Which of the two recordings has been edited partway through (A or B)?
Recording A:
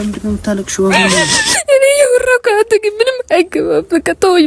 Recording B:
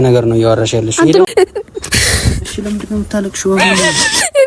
B